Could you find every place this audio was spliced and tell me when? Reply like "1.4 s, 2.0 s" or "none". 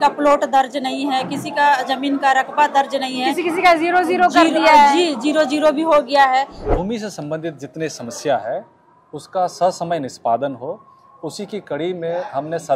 6.6 s